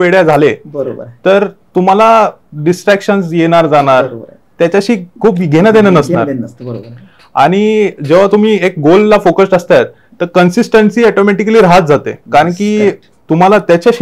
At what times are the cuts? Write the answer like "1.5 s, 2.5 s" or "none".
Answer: none